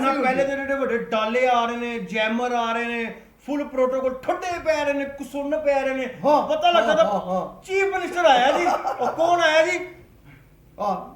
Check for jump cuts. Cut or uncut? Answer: uncut